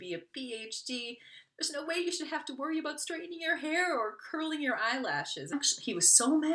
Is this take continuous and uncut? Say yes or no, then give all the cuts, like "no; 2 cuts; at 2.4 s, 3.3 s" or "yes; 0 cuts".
no; 1 cut; at 5.5 s